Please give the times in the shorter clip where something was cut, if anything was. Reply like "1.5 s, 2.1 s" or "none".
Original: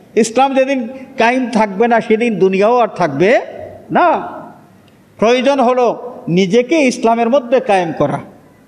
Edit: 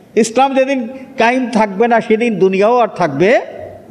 none